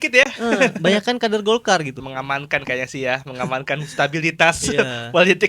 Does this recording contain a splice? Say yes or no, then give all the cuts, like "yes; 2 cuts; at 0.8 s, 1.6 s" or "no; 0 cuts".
yes; 1 cut; at 2.0 s